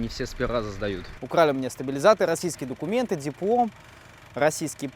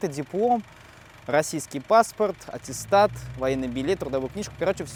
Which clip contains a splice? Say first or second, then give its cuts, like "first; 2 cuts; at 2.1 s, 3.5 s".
first; 1 cut; at 1.1 s